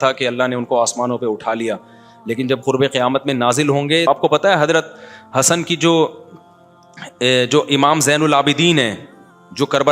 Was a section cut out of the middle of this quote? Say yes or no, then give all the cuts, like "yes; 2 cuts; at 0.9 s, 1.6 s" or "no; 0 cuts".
yes; 1 cut; at 4.1 s